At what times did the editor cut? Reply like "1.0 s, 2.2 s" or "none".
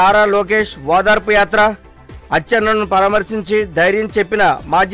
none

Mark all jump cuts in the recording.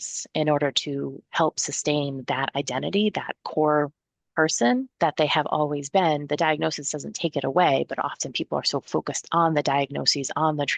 3.4 s, 4.9 s

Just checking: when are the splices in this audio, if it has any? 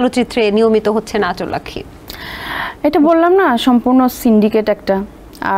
none

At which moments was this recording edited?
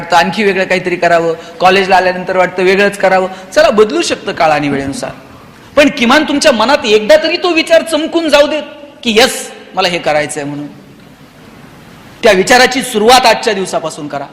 none

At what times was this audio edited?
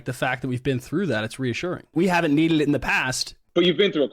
1.9 s

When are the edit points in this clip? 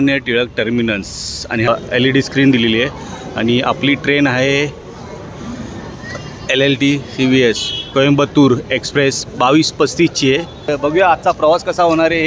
1.7 s, 10.7 s

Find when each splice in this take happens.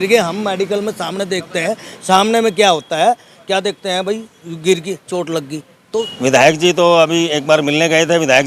6.0 s

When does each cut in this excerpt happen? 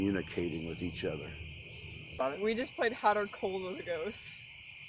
2.2 s

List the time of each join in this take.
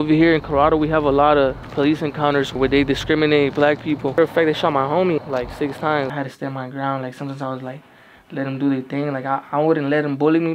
2.5 s, 4.2 s, 5.2 s, 6.1 s

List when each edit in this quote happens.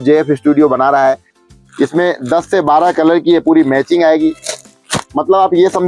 1.3 s, 4.7 s

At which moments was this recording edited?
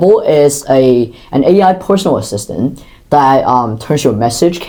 none

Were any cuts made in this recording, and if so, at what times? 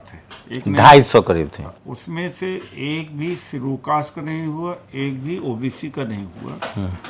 1.8 s

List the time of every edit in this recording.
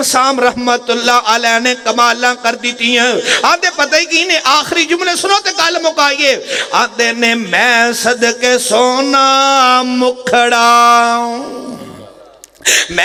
none

